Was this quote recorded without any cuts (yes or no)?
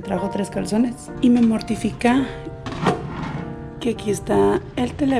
yes